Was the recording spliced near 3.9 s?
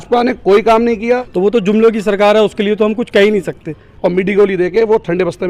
yes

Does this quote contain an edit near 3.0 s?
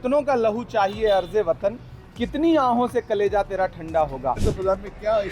no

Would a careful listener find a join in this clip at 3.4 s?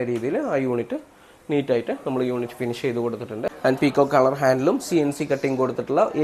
yes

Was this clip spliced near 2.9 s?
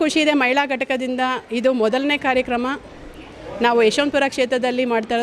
no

